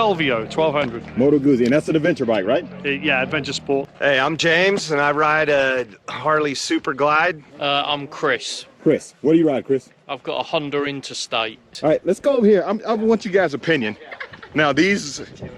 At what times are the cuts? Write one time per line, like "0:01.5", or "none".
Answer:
0:03.9
0:07.5
0:11.7